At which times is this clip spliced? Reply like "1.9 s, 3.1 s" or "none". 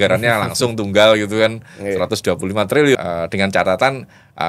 3.0 s